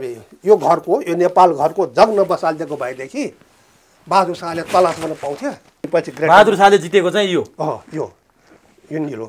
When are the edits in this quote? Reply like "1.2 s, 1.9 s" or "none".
5.9 s